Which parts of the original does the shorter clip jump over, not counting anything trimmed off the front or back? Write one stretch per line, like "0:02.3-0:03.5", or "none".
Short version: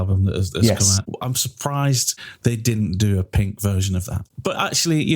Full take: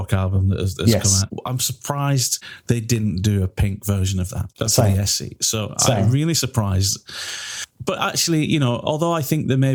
0:04.4-0:07.6